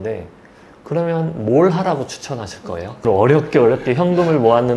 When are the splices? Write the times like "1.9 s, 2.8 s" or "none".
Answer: 3.0 s